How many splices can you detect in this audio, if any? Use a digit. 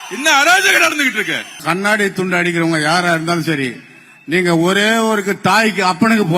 1